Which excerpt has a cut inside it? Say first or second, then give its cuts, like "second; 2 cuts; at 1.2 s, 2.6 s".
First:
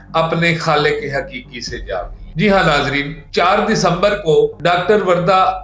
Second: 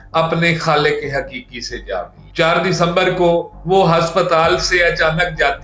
second; 1 cut; at 2.2 s